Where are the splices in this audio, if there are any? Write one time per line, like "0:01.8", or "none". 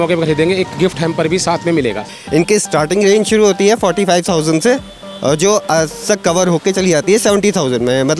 0:02.1